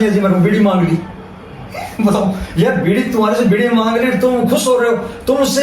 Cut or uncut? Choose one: uncut